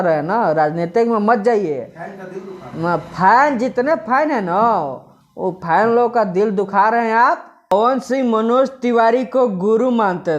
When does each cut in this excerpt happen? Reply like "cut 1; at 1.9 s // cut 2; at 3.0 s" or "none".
cut 1; at 7.5 s